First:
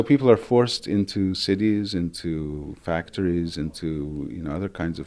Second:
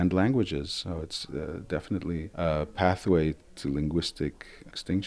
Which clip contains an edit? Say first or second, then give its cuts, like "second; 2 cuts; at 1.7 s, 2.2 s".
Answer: second; 1 cut; at 3.4 s